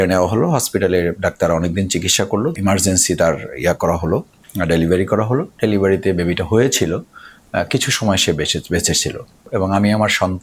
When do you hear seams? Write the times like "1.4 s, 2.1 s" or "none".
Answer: 2.6 s, 9.5 s